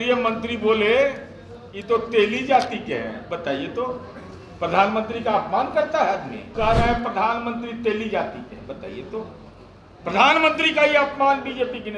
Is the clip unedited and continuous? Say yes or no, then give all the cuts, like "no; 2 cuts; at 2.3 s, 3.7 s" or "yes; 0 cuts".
no; 1 cut; at 6.5 s